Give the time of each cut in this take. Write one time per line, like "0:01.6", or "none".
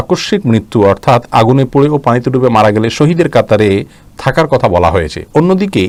none